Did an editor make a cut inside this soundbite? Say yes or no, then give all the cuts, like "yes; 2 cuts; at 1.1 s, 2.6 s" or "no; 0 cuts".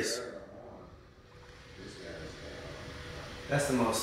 no; 0 cuts